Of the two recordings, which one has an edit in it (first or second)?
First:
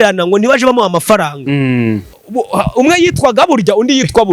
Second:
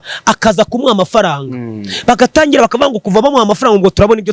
first